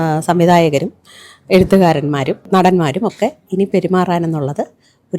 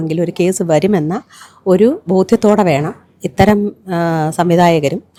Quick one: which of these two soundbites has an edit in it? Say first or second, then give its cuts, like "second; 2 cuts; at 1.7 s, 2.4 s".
first; 1 cut; at 2.4 s